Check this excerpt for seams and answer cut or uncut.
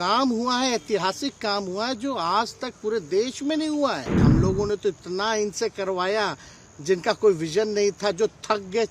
cut